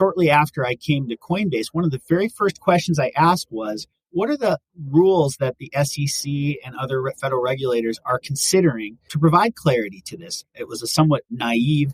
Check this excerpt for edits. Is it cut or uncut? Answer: uncut